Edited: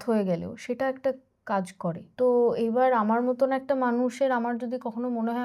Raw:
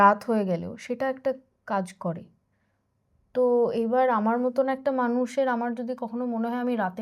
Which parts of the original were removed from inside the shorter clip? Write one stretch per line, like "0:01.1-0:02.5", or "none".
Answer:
0:02.3-0:03.2